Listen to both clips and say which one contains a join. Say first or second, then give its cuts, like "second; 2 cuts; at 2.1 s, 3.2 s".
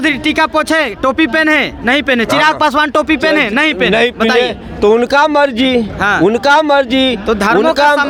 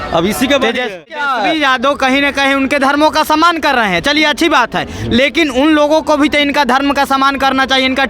second; 1 cut; at 1.2 s